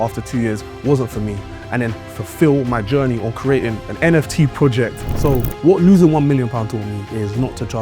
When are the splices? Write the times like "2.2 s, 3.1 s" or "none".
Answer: 5.1 s

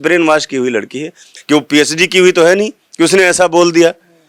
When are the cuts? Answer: 1.3 s

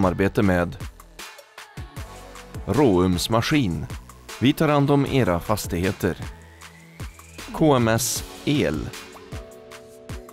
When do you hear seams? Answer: 8.9 s

